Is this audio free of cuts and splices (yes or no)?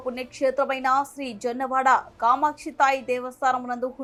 yes